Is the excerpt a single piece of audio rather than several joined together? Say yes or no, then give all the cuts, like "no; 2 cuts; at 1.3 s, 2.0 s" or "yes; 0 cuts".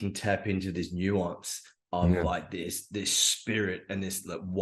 yes; 0 cuts